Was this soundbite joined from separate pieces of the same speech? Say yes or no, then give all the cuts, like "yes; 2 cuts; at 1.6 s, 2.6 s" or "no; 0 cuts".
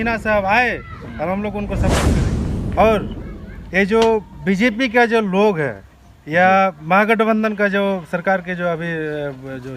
yes; 1 cut; at 2.1 s